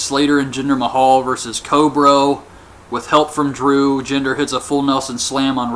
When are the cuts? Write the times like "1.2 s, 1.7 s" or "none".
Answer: none

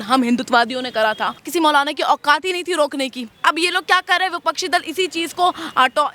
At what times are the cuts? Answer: 1.4 s, 3.3 s

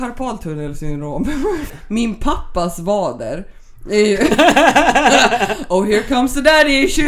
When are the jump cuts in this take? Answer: 1.8 s

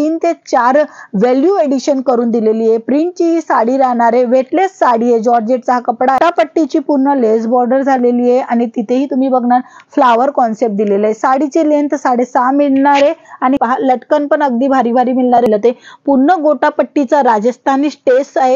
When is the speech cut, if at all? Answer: 6.2 s, 13.6 s, 15.5 s

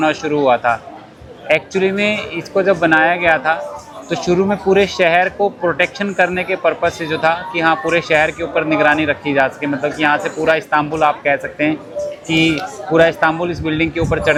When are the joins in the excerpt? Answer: none

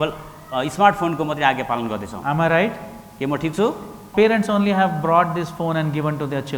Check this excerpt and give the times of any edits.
4.1 s

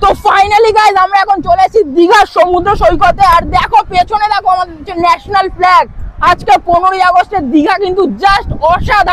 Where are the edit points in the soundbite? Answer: none

